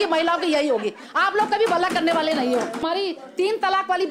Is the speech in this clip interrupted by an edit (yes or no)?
yes